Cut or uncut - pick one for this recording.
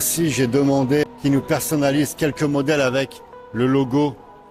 cut